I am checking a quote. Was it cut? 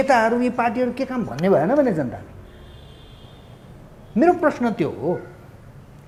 no; 0 cuts

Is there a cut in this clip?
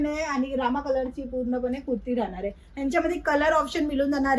no; 0 cuts

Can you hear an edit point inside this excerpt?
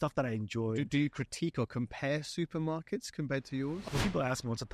yes; 1 cut; at 3.8 s

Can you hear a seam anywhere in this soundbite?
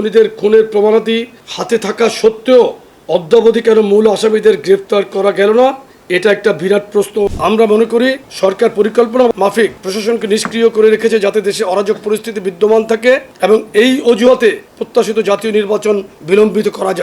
yes; 6 cuts; at 7.3 s, 8.3 s, 9.3 s, 13.3 s, 14.7 s, 16.1 s

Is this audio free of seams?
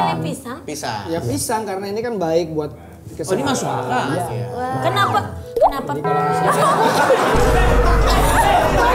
no; 1 cut; at 4.2 s

